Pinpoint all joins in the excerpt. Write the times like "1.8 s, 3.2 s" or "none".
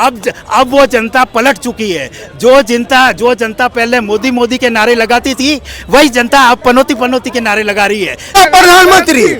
8.3 s